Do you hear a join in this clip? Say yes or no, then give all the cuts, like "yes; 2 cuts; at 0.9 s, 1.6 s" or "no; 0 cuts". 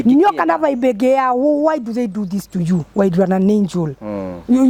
no; 0 cuts